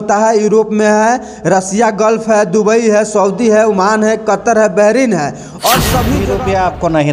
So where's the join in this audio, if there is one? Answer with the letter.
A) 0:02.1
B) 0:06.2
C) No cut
B